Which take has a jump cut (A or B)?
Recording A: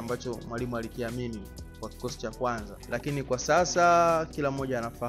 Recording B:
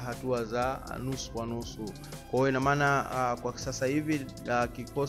A